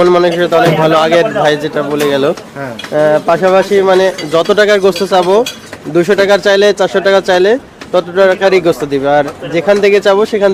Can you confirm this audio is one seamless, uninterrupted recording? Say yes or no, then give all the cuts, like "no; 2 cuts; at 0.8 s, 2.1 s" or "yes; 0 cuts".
yes; 0 cuts